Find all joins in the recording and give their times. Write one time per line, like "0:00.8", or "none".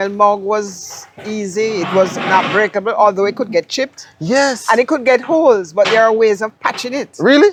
none